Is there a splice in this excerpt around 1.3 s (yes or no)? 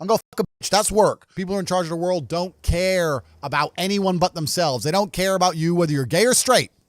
yes